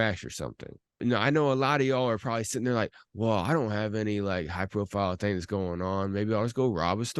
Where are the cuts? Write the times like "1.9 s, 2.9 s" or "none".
1.0 s